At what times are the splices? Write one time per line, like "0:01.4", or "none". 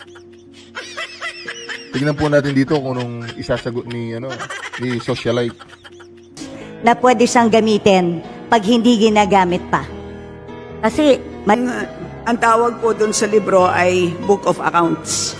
0:11.5